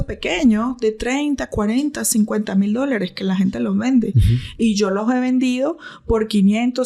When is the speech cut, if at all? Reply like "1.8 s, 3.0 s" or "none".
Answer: none